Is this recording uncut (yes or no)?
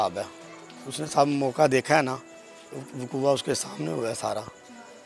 yes